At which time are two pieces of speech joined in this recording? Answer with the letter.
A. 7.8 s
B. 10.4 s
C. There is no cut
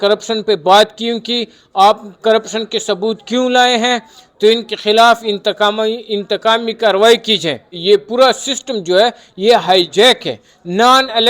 A